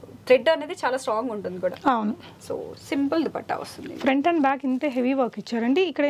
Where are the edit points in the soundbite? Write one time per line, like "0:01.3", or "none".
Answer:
none